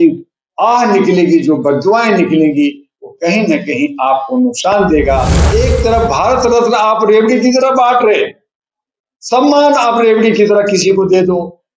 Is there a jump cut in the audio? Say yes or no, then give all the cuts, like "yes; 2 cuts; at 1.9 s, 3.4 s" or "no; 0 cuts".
yes; 1 cut; at 5.4 s